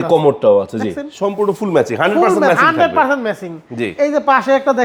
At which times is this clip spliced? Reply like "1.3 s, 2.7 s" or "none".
none